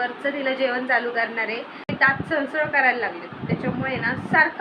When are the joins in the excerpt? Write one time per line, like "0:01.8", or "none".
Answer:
0:01.8